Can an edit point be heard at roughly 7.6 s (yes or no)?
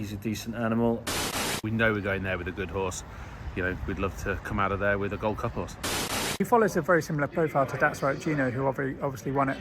no